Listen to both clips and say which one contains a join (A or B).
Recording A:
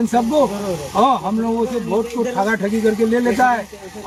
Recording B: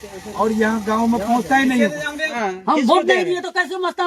B